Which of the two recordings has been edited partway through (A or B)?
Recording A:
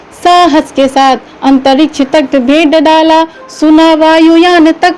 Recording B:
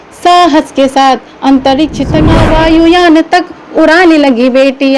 B